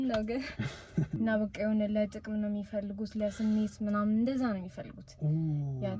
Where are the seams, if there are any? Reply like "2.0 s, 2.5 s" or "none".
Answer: 1.1 s